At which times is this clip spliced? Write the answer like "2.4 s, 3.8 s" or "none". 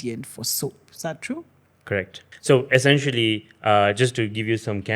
2.3 s